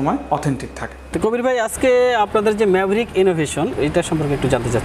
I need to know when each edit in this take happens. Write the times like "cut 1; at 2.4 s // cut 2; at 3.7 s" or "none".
none